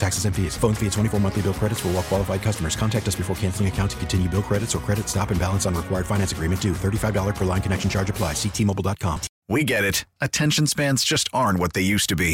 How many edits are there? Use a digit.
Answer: 1